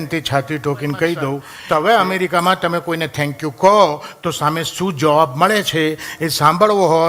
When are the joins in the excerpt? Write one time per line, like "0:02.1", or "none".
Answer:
0:01.5